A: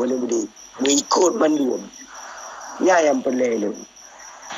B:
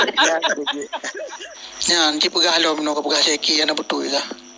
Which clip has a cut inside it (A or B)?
B